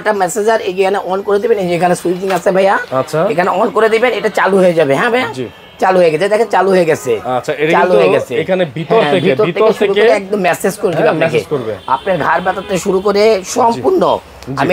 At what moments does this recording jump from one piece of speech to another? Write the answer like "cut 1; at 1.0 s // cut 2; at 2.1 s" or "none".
none